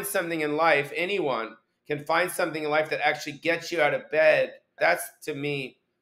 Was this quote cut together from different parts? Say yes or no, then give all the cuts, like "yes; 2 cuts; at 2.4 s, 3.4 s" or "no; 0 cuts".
yes; 1 cut; at 4.7 s